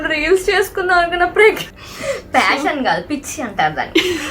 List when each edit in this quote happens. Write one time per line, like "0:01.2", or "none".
0:01.6